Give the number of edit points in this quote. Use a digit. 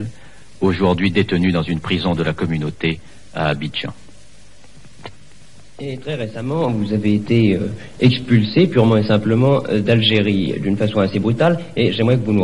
0